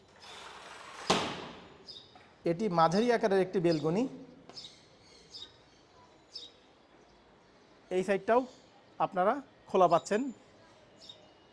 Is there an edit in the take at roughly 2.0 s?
no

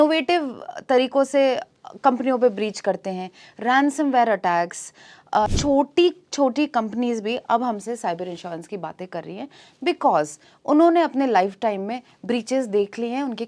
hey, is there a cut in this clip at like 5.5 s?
yes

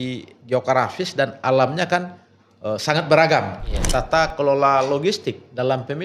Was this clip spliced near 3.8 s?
yes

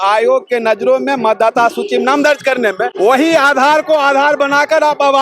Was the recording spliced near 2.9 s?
yes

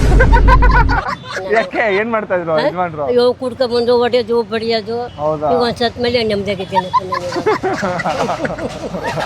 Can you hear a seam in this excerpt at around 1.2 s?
yes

